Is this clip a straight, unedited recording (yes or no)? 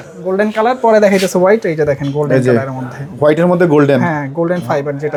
yes